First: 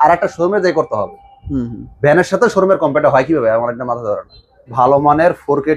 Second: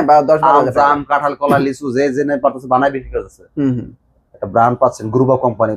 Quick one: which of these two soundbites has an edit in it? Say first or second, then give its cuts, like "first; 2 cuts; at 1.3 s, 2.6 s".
first; 1 cut; at 4.7 s